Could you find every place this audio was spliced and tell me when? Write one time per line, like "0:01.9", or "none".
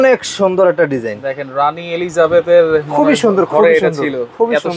none